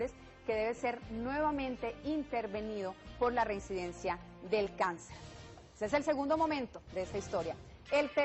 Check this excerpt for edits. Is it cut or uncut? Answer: cut